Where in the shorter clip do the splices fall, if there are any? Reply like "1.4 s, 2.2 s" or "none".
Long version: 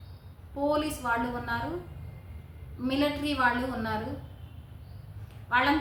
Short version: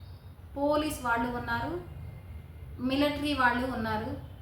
none